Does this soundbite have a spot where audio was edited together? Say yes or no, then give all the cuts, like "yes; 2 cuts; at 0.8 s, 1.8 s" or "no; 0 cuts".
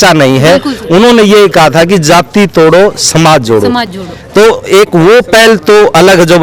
no; 0 cuts